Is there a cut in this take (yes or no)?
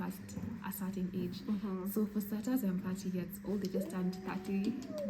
no